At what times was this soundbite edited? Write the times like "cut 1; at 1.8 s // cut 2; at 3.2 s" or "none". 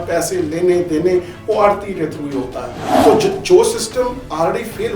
cut 1; at 2.8 s